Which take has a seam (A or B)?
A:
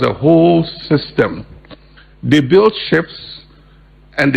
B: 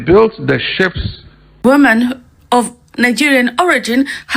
B